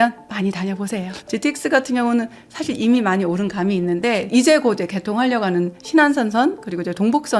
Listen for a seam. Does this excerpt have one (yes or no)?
yes